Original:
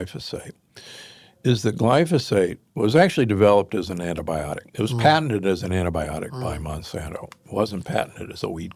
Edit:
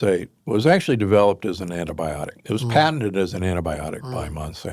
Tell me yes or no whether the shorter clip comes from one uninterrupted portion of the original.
yes